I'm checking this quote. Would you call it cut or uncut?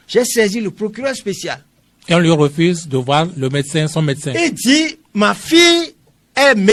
uncut